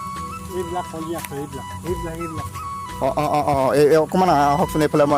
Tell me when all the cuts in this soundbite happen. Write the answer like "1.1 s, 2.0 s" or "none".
none